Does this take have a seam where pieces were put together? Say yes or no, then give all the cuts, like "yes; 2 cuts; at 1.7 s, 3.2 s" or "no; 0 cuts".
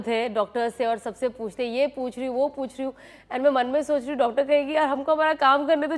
no; 0 cuts